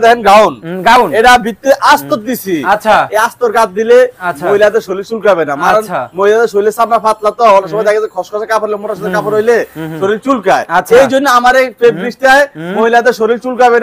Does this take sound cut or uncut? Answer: uncut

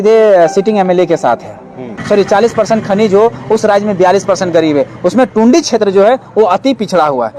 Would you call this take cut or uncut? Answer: cut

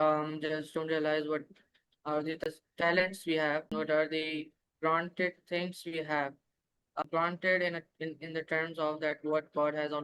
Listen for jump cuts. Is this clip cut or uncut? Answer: cut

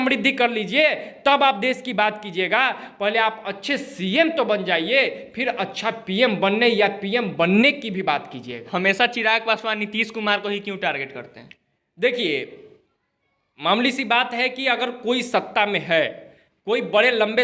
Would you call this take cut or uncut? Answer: uncut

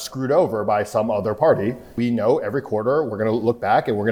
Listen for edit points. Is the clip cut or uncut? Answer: cut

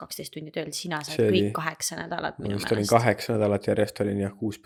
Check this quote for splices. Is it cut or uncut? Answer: uncut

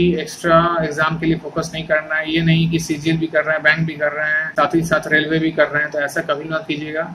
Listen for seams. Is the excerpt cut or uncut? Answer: cut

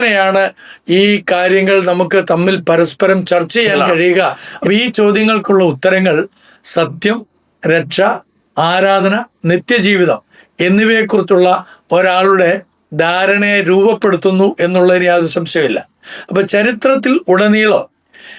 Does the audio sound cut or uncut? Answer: cut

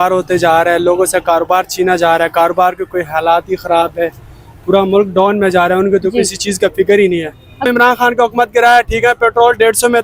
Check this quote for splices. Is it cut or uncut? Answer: cut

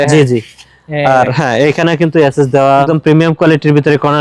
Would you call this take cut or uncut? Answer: cut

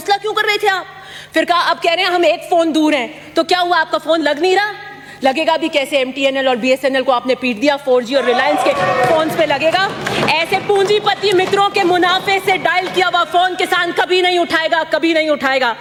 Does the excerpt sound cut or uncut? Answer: uncut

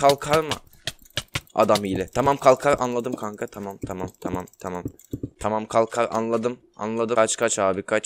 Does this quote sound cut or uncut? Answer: cut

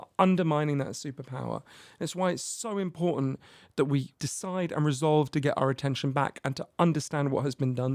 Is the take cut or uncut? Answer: cut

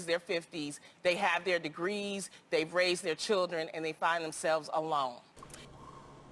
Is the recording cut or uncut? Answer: cut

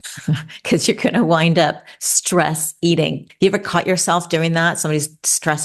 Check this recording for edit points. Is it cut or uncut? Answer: cut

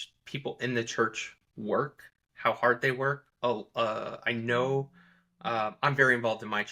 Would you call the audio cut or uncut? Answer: uncut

